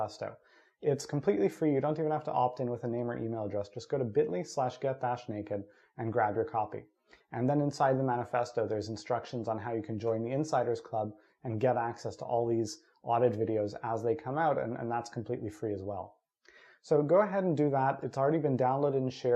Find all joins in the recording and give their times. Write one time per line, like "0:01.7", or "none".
none